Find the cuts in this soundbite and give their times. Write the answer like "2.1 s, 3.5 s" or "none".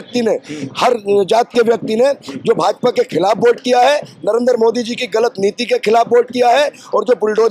none